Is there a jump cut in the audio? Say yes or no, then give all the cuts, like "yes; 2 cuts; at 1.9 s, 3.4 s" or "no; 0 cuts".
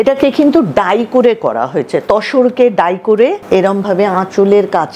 yes; 1 cut; at 3.4 s